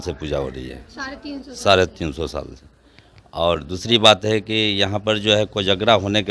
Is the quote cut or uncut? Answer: uncut